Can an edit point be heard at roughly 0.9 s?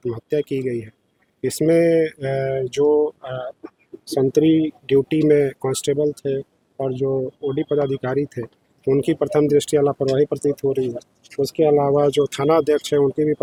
no; 0 cuts

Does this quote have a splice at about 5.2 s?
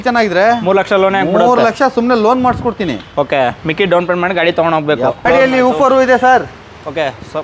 yes; 1 cut; at 5.2 s

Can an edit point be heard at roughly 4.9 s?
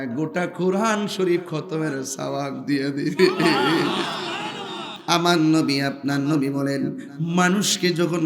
yes; 1 cut; at 4.9 s

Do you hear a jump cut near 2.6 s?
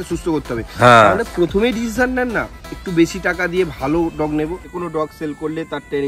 no; 1 cut; at 4.7 s

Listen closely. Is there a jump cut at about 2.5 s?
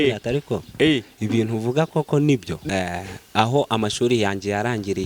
yes; 1 cut; at 2.5 s

